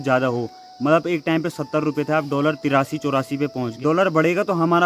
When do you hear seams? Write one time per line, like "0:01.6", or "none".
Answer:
0:03.7